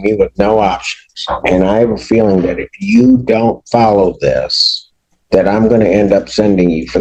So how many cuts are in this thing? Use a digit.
0